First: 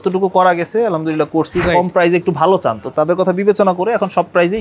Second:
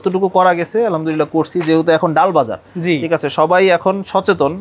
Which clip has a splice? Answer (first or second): first